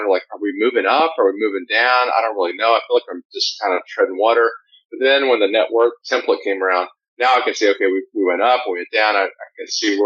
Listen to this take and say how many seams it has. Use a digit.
1